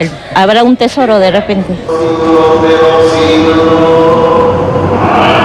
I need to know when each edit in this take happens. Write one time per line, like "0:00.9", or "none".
0:01.4